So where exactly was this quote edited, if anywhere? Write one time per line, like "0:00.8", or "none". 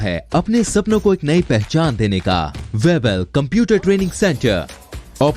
0:02.6